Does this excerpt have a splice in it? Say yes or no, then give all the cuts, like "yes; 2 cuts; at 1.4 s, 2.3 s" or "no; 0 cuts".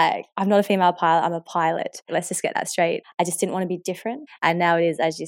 yes; 3 cuts; at 2.1 s, 3.0 s, 4.3 s